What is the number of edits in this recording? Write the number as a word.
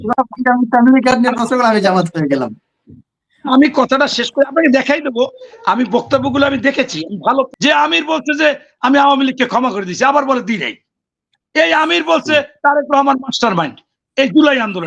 one